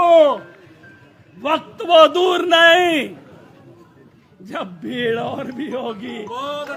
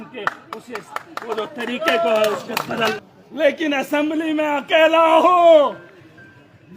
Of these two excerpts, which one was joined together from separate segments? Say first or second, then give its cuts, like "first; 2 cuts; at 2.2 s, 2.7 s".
second; 1 cut; at 3.0 s